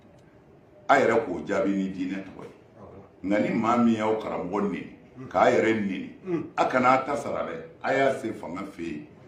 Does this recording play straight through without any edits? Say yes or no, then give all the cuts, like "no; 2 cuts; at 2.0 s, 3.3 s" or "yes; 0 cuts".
yes; 0 cuts